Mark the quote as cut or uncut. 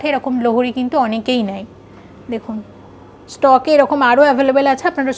uncut